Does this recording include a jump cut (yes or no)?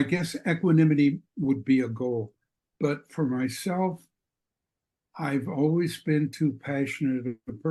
no